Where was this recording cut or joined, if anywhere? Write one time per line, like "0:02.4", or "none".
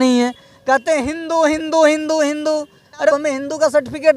0:03.1